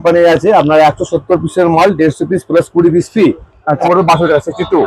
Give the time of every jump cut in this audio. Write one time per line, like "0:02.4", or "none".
0:03.8